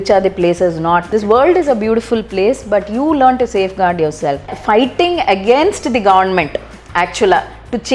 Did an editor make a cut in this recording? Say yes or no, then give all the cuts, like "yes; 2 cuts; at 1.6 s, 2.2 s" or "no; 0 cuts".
yes; 2 cuts; at 1.1 s, 4.6 s